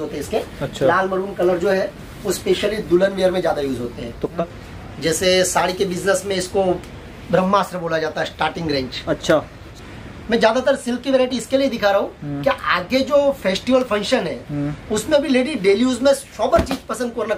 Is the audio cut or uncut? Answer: cut